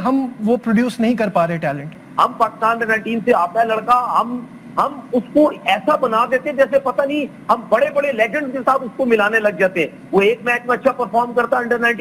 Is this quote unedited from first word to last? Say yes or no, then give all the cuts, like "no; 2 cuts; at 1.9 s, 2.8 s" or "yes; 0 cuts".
no; 1 cut; at 2.0 s